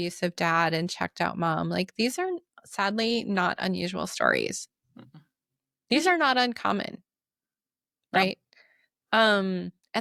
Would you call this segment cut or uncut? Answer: uncut